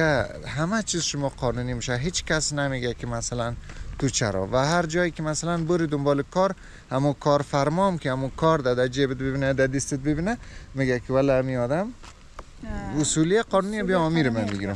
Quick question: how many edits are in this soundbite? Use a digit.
0